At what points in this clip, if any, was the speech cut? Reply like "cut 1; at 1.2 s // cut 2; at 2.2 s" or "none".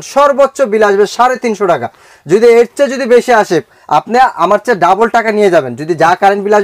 none